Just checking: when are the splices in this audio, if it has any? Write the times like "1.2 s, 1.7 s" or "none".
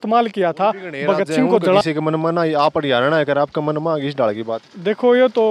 1.8 s